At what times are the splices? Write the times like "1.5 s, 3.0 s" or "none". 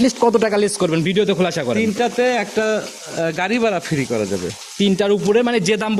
none